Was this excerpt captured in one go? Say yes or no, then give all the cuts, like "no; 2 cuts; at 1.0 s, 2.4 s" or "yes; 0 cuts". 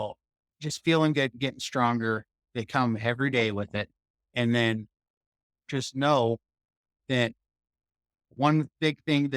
no; 1 cut; at 5.5 s